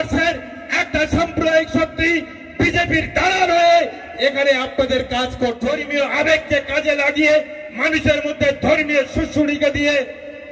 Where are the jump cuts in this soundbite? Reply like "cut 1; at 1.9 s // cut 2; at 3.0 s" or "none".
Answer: cut 1; at 5.6 s

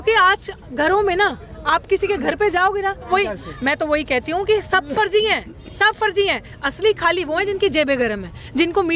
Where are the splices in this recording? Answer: cut 1; at 3.1 s

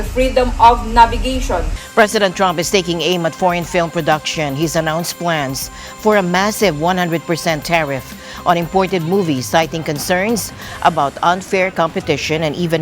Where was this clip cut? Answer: cut 1; at 1.8 s

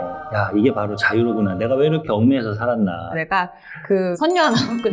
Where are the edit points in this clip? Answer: cut 1; at 3.1 s

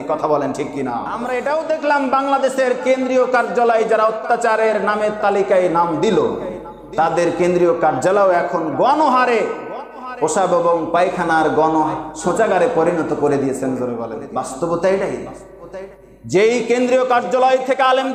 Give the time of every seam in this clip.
cut 1; at 1.1 s // cut 2; at 14.1 s

